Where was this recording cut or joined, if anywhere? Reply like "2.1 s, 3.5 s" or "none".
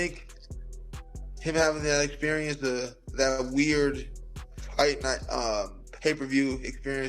none